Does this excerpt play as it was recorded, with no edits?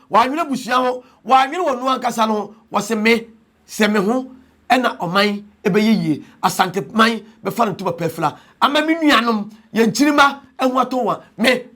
yes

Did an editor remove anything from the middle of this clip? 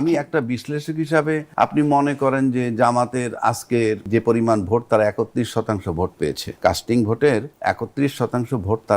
yes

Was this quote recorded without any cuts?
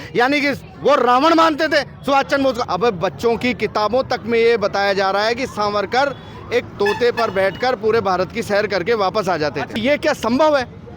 no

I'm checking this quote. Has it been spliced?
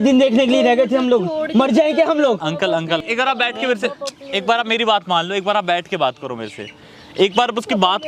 yes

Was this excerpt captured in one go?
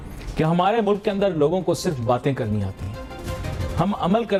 yes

